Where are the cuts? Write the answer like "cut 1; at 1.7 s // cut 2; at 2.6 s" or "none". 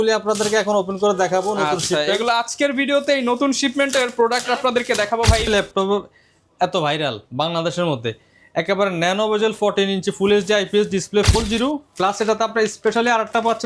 cut 1; at 5.5 s // cut 2; at 11.3 s